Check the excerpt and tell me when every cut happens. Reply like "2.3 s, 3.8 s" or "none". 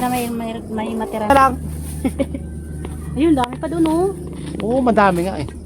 1.3 s